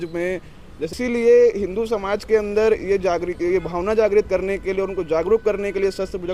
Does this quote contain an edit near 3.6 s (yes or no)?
no